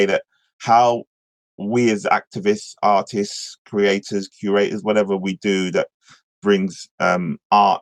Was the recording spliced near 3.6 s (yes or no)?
no